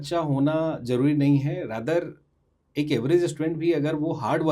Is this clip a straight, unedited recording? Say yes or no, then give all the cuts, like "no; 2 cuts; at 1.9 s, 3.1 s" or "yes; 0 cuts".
yes; 0 cuts